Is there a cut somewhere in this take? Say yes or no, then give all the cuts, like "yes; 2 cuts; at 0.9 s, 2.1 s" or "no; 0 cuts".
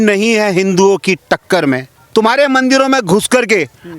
yes; 1 cut; at 1.9 s